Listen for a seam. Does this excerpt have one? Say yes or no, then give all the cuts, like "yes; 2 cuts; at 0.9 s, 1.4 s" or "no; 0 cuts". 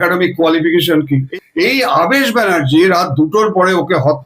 yes; 1 cut; at 1.3 s